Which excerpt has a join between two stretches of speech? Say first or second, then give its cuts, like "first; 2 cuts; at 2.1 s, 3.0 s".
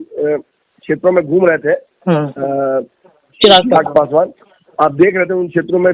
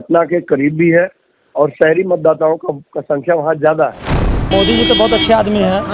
second; 1 cut; at 4.3 s